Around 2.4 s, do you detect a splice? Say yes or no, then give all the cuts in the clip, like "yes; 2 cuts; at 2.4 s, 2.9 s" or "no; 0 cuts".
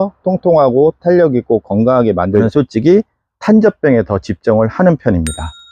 yes; 1 cut; at 2.4 s